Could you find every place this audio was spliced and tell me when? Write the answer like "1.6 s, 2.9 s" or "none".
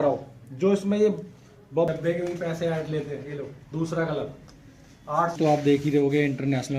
1.9 s, 5.4 s